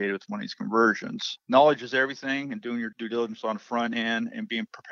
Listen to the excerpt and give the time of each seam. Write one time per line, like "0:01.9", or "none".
0:01.2
0:02.9